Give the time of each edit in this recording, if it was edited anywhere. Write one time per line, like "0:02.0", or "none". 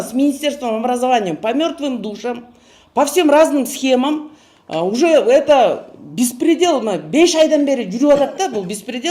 none